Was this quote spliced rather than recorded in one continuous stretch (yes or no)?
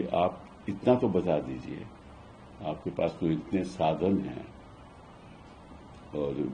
no